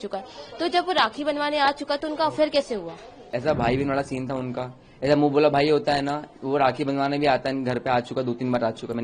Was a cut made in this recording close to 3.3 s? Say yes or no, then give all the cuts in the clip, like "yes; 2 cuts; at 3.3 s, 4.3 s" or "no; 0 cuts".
yes; 1 cut; at 3.3 s